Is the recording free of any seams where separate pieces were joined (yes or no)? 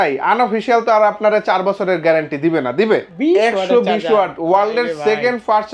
no